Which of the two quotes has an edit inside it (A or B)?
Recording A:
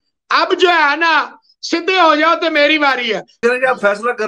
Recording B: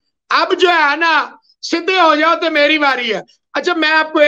A